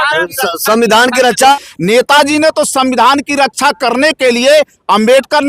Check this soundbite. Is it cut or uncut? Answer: cut